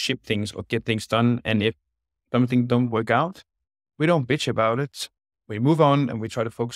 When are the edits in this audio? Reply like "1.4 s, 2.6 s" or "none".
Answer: none